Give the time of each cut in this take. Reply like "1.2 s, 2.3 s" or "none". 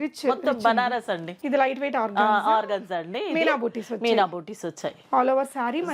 1.3 s

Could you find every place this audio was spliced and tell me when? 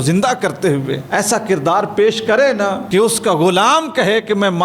1.0 s, 2.8 s

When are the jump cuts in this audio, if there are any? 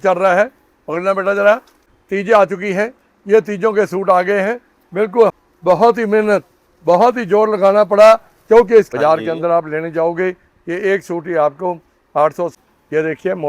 1.9 s, 5.3 s, 8.9 s, 12.5 s

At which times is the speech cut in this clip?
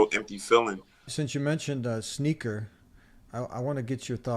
1.1 s

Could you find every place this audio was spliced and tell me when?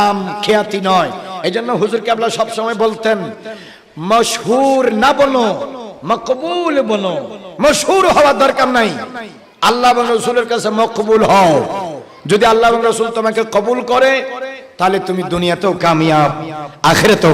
7.4 s

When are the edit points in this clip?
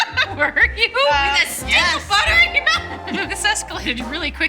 3.3 s

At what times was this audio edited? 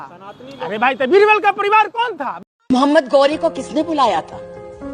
2.4 s

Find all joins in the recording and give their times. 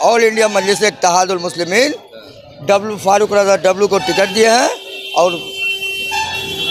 none

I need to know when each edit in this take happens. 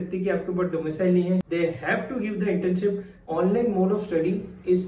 1.4 s, 3.2 s

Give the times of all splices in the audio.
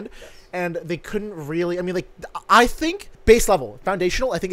3.1 s

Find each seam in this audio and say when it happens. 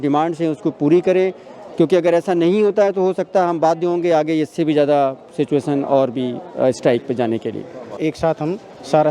7.9 s

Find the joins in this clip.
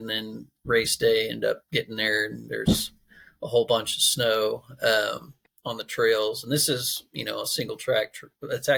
none

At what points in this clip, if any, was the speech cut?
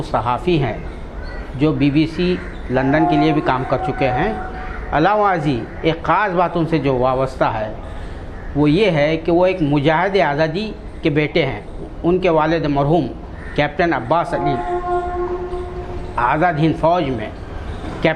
none

